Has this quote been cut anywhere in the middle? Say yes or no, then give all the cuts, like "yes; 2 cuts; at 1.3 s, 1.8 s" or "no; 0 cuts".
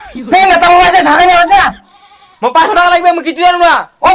no; 0 cuts